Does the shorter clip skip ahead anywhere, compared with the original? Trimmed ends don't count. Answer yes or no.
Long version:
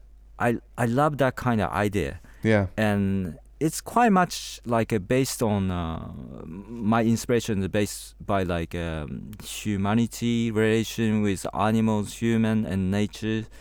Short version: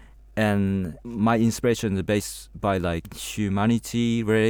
yes